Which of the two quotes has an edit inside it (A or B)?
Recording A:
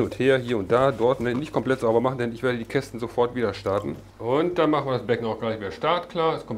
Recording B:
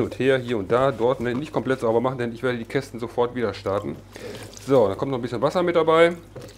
A